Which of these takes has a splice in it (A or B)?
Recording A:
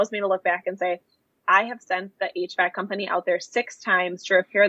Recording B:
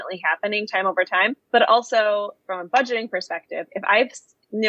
B